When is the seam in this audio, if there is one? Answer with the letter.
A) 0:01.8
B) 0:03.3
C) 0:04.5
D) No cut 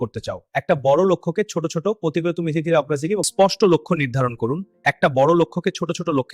B